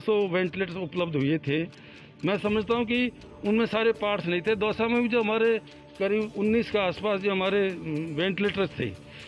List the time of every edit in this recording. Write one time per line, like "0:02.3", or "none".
none